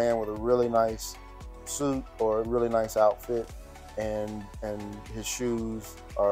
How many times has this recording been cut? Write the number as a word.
zero